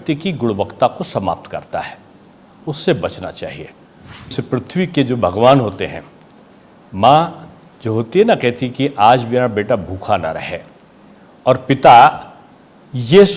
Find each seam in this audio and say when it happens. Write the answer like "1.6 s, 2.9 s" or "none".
4.3 s